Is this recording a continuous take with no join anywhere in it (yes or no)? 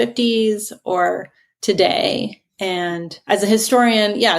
no